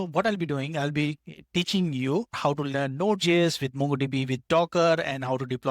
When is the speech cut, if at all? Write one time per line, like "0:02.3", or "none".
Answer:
0:02.4